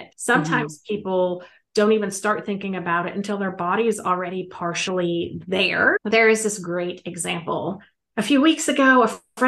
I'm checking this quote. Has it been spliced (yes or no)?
yes